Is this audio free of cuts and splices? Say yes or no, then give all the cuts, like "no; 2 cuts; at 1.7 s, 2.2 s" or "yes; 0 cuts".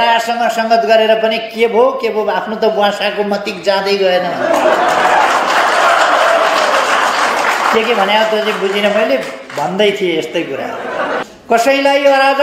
no; 1 cut; at 11.2 s